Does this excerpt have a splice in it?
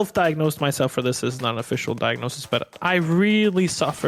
no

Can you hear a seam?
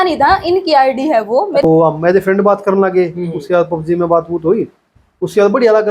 yes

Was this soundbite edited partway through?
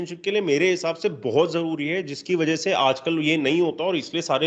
no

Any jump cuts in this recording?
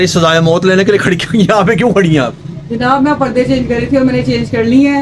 no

